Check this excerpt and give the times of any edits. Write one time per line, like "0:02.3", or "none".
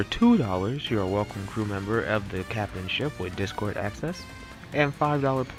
none